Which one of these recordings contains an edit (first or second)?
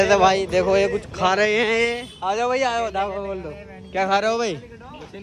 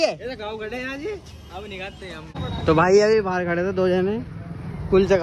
second